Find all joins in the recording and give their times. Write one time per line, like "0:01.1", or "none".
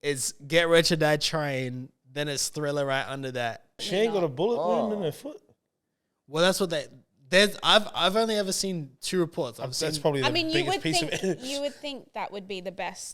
0:03.8